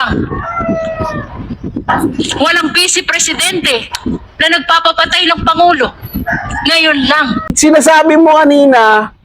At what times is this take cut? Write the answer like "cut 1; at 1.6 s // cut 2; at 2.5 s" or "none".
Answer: cut 1; at 7.5 s